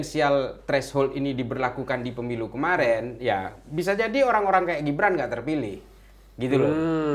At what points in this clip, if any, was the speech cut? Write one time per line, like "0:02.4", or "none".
none

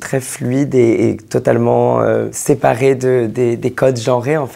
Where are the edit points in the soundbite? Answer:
none

